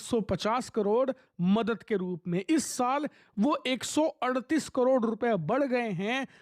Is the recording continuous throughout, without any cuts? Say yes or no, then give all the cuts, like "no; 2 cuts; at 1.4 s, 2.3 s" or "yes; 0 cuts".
yes; 0 cuts